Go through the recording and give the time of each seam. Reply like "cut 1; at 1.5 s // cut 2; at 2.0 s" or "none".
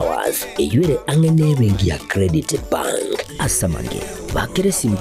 cut 1; at 3.8 s